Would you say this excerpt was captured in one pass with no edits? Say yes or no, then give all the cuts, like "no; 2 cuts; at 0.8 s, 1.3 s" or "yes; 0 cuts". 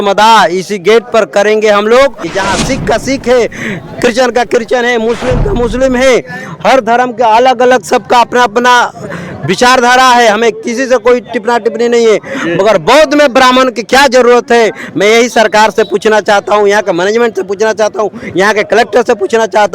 no; 1 cut; at 2.2 s